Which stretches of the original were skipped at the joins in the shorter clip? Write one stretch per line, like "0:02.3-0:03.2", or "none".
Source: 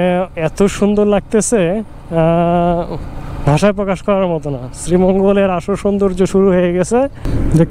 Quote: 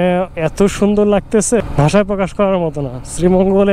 0:01.6-0:03.3